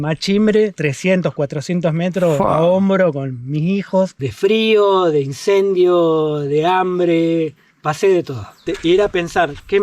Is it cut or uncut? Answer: cut